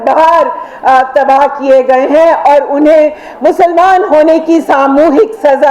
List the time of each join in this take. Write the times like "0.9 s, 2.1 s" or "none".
none

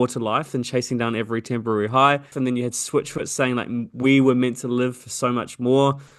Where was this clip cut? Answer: 2.3 s

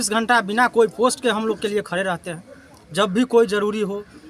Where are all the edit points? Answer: none

